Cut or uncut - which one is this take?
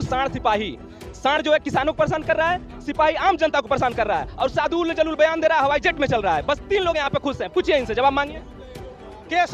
uncut